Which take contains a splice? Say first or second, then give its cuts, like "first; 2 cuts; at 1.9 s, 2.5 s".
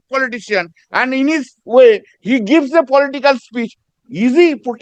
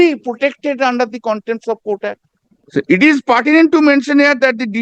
second; 1 cut; at 2.5 s